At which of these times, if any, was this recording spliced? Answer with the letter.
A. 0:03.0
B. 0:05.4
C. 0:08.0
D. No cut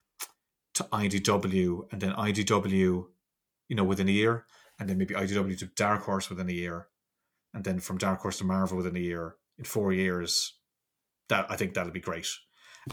D